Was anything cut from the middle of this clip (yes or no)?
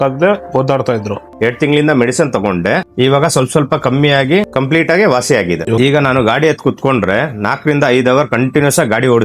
yes